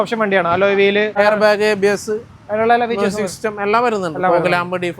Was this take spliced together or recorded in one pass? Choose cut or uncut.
cut